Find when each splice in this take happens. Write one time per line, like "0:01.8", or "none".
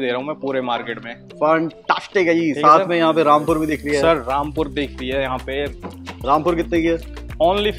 none